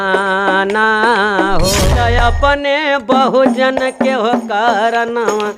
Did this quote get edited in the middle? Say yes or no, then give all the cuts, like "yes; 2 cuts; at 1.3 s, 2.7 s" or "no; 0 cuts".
yes; 1 cut; at 1.9 s